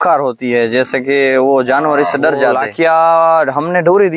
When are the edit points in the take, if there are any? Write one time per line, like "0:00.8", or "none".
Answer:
0:02.6

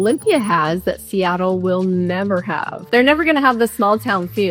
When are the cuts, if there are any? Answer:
0:02.7

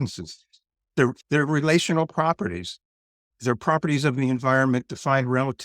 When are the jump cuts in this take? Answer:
0:01.2

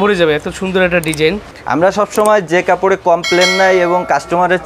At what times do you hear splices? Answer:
0:01.5

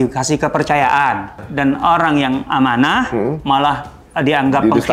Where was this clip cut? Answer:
0:01.4

